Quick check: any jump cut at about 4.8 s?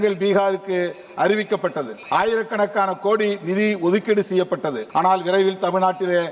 yes; 2 cuts; at 1.9 s, 4.8 s

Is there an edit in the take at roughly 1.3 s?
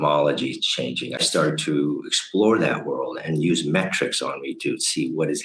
yes; 1 cut; at 1.3 s

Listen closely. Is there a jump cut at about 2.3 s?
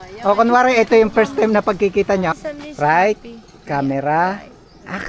yes; 1 cut; at 2.3 s

